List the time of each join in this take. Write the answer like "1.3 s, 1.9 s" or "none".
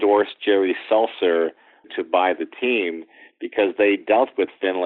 1.9 s